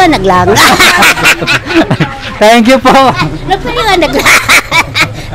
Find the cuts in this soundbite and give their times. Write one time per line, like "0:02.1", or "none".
none

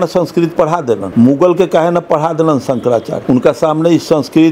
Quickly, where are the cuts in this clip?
0:01.1
0:03.1

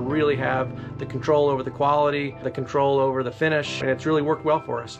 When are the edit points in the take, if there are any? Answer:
0:02.5
0:03.8

